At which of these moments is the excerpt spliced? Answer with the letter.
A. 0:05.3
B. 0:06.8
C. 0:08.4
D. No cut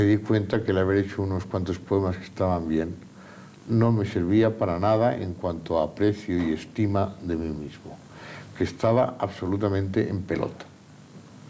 D